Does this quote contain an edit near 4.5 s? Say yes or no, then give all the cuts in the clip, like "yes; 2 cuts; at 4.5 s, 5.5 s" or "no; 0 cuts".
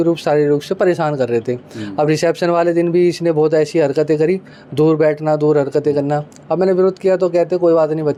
no; 0 cuts